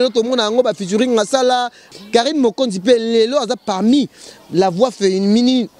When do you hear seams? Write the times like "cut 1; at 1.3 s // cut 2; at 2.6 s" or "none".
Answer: cut 1; at 1.8 s